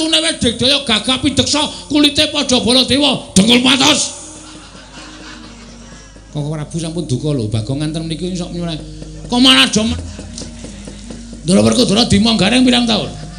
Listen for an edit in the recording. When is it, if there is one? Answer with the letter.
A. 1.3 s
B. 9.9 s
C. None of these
B